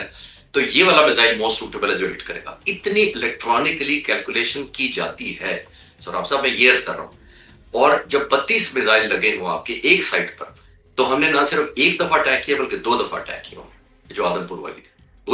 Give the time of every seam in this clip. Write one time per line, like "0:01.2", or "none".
none